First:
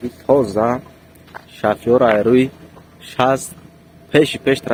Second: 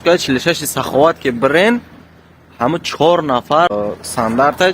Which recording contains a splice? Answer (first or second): second